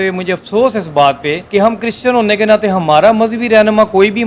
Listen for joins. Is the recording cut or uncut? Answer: cut